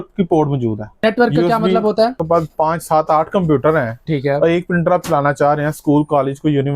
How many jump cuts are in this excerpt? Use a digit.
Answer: 2